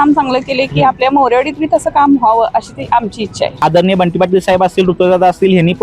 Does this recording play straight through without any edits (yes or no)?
no